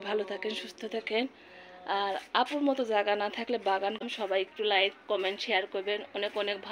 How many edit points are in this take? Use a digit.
1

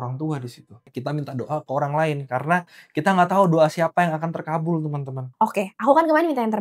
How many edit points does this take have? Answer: 2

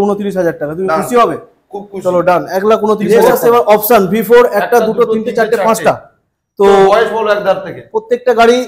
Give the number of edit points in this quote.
1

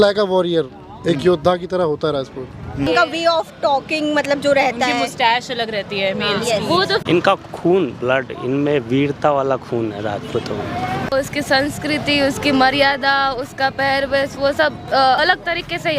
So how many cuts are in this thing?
3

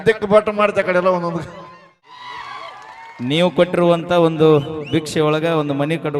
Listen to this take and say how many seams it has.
1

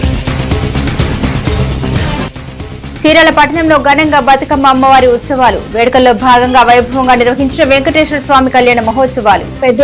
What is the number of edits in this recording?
1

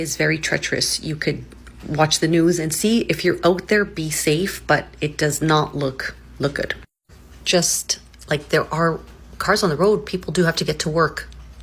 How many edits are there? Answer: 0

